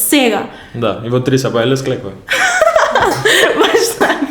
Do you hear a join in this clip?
no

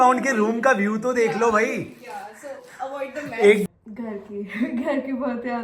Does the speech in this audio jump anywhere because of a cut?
yes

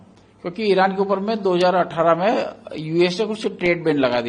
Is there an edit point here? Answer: no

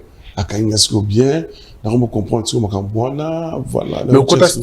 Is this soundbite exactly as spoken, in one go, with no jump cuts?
yes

